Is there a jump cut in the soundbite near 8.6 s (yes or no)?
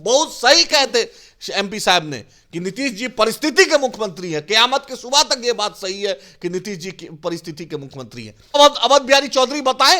yes